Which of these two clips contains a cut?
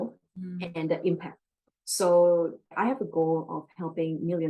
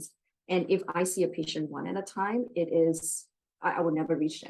first; 1 cut; at 2.7 s

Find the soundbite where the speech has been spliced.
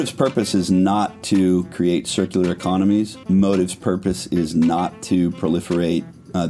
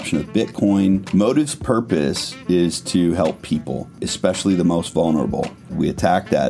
second; 3 cuts; at 1.0 s, 4.1 s, 5.7 s

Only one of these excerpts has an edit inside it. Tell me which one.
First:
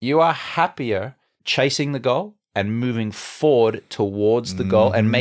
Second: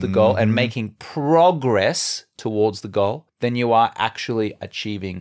second; 1 cut; at 3.3 s

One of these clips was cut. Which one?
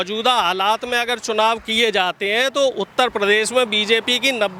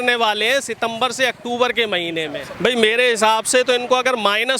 second; 1 cut; at 2.4 s

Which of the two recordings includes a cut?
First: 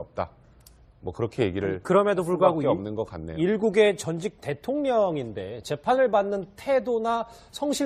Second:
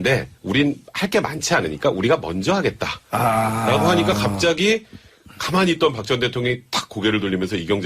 second; 1 cut; at 6.5 s

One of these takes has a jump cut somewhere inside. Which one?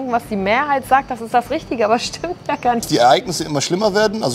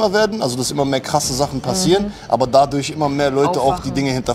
first; 1 cut; at 2.9 s

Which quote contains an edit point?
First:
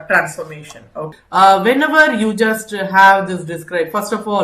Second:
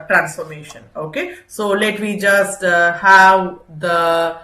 first; 1 cut; at 1.2 s

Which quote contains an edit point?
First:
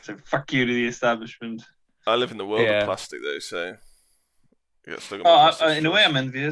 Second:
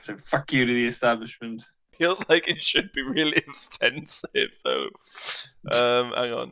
second; 1 cut; at 1.8 s

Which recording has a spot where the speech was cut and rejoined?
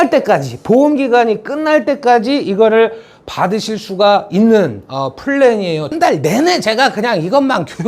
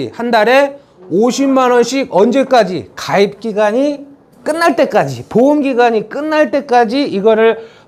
first; 1 cut; at 5.9 s

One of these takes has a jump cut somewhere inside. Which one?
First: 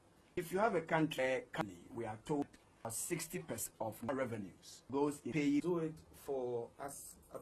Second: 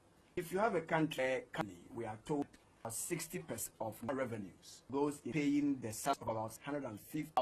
second; 1 cut; at 5.6 s

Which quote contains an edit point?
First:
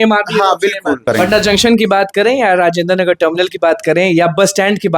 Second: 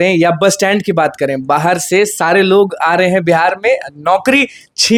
first; 1 cut; at 1.0 s

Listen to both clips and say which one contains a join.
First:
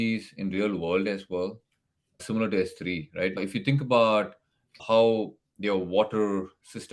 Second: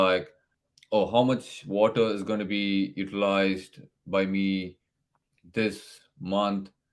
first; 3 cuts; at 2.2 s, 3.4 s, 4.8 s

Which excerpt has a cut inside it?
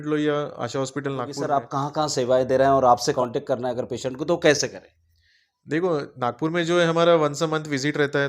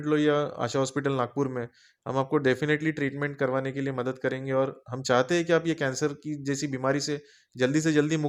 first; 2 cuts; at 1.4 s, 3.1 s

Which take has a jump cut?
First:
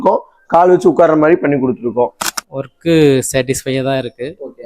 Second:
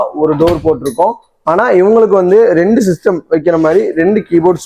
first; 1 cut; at 2.2 s

